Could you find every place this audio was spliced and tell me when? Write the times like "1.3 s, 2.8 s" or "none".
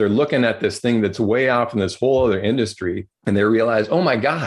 3.1 s

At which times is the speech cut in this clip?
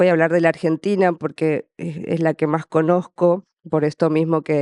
none

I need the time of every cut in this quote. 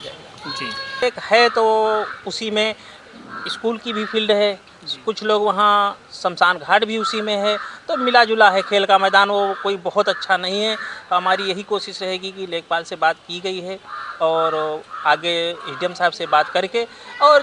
1.0 s

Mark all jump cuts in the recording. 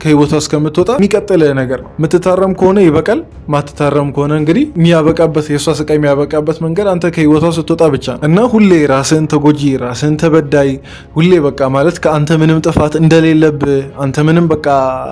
none

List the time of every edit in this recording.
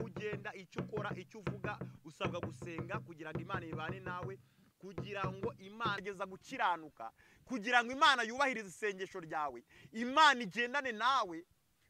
6.0 s

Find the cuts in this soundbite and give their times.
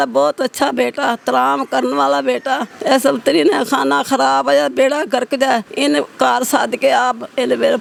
none

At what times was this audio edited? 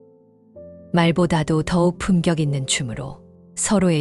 0.9 s

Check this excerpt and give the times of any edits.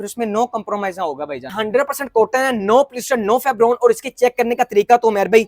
1.6 s

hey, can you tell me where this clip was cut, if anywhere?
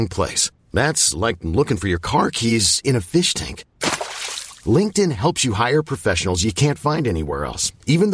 none

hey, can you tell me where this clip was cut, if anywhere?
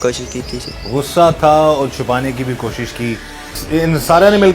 3.5 s

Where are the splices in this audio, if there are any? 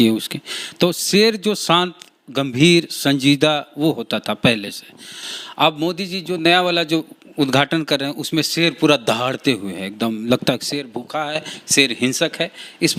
none

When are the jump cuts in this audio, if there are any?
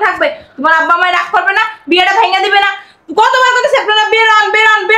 none

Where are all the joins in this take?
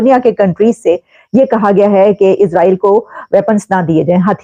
none

